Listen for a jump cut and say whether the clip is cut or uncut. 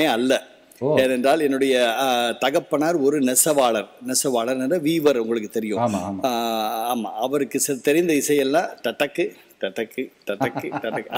uncut